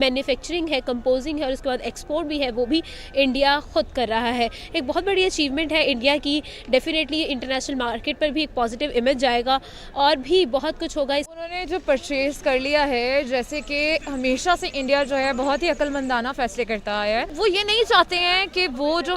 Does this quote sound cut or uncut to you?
uncut